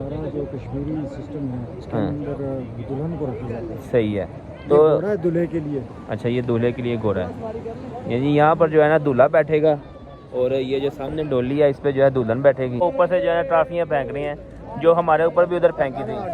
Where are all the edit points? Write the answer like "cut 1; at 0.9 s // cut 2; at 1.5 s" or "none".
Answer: cut 1; at 12.8 s